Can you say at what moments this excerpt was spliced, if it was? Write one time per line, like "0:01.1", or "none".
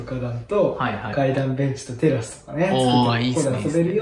none

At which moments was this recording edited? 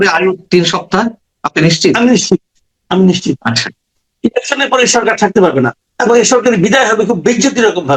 none

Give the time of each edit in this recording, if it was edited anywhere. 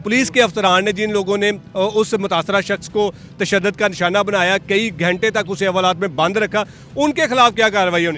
none

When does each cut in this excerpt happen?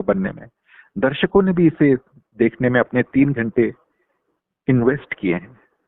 none

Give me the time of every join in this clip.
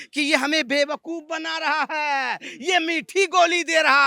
none

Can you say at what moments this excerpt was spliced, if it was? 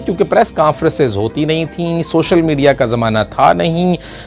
none

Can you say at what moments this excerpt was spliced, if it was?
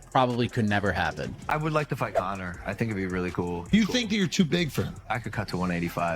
0:01.5

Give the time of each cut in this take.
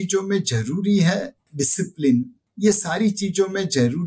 0:01.4
0:02.4

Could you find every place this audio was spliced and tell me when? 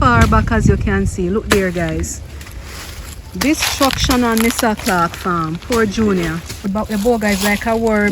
0:06.5

